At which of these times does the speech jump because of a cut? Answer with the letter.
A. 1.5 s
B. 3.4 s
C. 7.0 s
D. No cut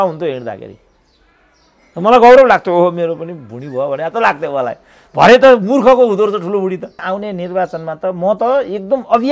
C